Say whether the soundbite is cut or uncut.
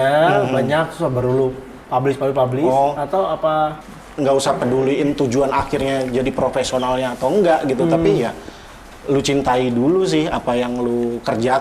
cut